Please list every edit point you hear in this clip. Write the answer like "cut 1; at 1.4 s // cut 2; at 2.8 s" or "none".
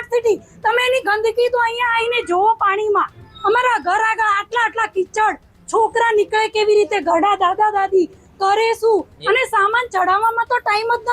none